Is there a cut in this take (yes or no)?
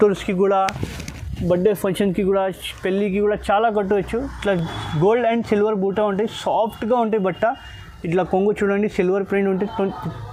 no